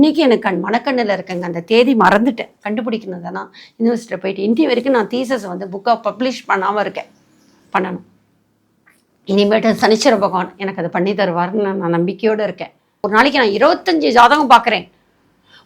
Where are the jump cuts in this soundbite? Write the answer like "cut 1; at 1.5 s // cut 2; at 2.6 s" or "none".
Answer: cut 1; at 13.0 s